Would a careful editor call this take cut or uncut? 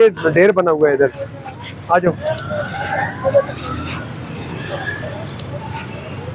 uncut